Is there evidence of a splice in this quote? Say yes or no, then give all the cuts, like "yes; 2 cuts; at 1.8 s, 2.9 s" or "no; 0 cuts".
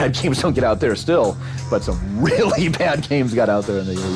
no; 0 cuts